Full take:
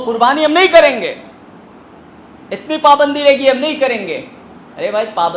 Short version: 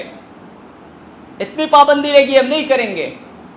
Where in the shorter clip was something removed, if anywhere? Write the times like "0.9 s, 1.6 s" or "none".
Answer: none